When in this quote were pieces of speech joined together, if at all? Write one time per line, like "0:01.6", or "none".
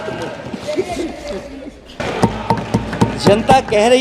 0:02.0